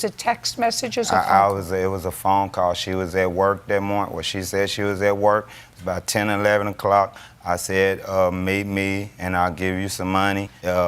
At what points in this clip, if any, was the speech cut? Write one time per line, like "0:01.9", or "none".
0:01.4